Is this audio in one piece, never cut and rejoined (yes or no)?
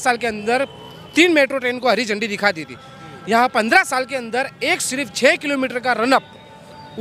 yes